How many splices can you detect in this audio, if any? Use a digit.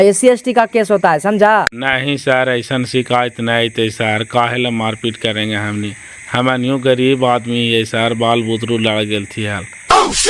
1